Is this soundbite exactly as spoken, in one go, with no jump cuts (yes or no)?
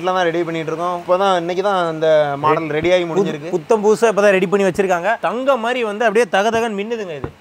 yes